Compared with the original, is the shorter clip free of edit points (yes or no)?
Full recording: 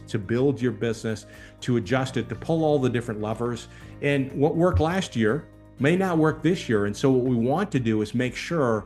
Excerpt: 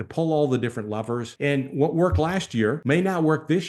no